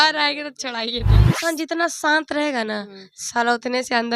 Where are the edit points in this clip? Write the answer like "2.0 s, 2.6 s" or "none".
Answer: 1.4 s